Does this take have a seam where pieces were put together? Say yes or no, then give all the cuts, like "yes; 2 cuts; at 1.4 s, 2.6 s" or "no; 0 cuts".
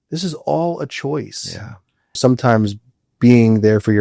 yes; 1 cut; at 2.2 s